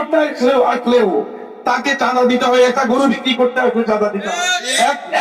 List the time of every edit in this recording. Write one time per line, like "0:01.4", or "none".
0:04.2